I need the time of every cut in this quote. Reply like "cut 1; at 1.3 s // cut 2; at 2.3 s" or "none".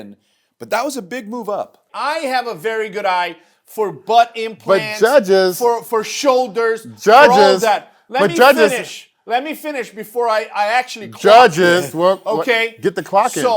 cut 1; at 1.9 s